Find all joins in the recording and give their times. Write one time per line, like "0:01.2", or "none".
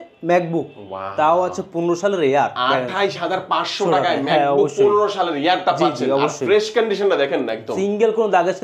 none